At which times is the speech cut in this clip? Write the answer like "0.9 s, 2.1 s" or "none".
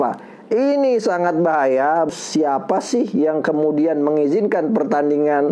2.1 s